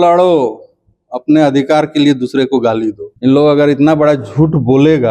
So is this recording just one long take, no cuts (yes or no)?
no